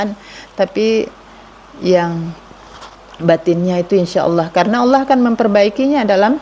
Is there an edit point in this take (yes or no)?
no